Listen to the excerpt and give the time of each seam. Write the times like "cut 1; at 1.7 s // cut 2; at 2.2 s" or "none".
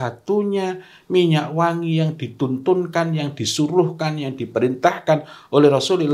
none